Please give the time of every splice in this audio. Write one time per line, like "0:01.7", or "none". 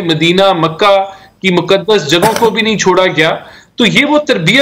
none